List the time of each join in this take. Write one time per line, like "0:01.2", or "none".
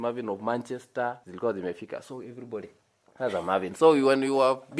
0:01.3